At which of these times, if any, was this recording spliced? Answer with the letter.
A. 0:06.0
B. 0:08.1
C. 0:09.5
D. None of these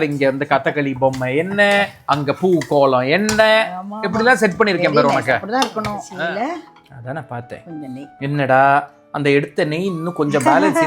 A